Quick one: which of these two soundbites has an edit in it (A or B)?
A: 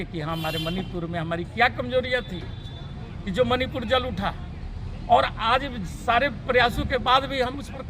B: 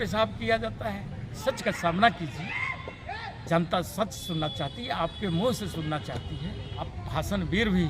B